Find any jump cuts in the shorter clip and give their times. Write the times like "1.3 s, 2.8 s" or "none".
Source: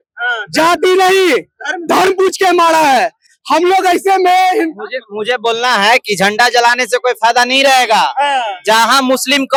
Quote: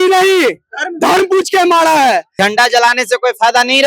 2.3 s